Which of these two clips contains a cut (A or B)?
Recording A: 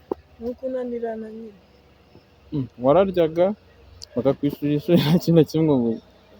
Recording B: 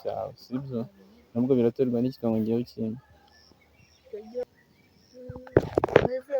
B